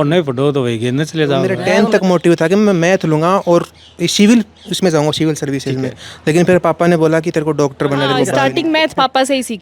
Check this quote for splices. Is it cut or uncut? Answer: cut